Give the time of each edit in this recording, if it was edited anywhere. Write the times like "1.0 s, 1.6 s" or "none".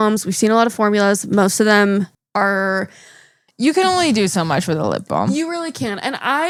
none